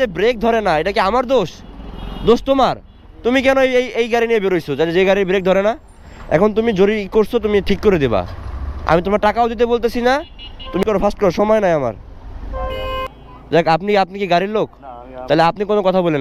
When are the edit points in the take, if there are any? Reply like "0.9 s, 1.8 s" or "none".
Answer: 10.8 s, 13.1 s